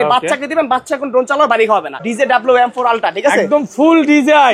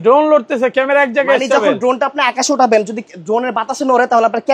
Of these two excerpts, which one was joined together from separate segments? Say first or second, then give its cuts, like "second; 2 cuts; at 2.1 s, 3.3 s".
first; 1 cut; at 2.0 s